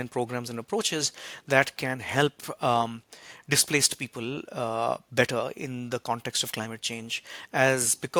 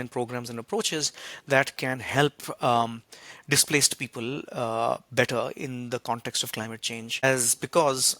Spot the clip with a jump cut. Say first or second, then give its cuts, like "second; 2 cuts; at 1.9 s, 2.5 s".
second; 1 cut; at 7.2 s